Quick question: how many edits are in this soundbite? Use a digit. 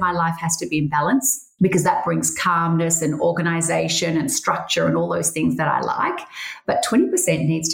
1